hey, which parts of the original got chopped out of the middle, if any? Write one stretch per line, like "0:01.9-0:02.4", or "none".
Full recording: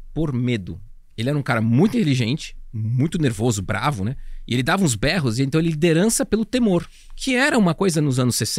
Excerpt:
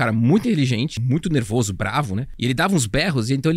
0:02.5-0:02.9
0:04.1-0:04.3